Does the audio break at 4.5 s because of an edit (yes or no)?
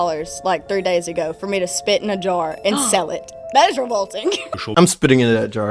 yes